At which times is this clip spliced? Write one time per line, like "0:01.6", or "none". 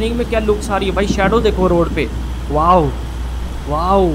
none